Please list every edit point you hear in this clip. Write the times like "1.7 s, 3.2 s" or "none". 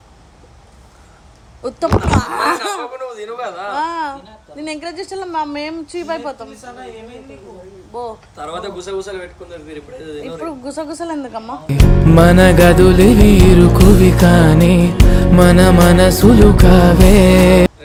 none